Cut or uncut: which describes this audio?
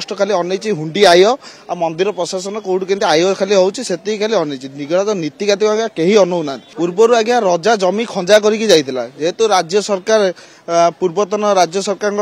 cut